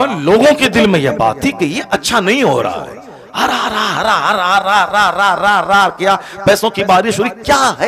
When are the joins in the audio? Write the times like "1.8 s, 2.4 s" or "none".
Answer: none